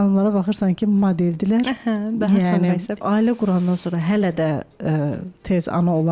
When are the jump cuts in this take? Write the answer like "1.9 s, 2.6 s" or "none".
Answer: 2.9 s